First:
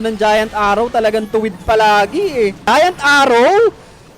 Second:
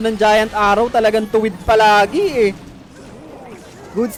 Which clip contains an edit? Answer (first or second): first